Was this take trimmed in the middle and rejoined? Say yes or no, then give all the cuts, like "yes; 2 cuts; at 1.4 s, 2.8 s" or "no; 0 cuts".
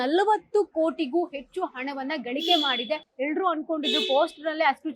yes; 1 cut; at 3.1 s